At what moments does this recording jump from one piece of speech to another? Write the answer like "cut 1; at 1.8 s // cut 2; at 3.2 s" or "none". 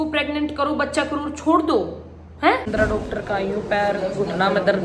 cut 1; at 2.7 s